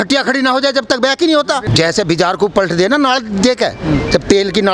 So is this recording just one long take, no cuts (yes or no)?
no